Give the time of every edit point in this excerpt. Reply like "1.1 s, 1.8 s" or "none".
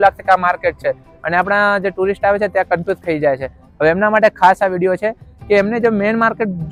none